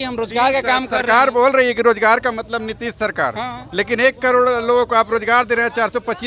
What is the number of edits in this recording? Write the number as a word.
zero